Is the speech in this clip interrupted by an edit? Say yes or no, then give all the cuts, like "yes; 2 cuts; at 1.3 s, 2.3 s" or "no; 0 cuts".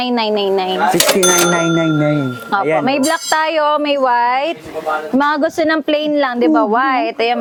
no; 0 cuts